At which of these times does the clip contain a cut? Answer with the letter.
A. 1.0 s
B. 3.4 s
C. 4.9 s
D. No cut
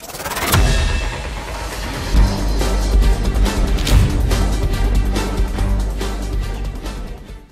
D